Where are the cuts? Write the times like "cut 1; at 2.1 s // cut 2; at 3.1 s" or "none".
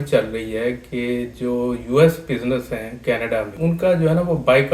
cut 1; at 3.6 s